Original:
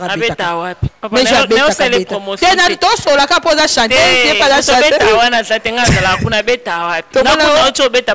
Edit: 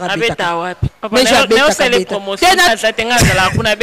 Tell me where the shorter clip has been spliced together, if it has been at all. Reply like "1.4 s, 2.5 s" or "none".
2.7 s